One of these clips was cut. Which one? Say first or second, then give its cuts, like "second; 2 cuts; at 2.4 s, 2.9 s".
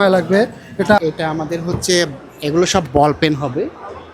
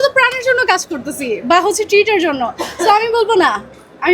first; 1 cut; at 1.0 s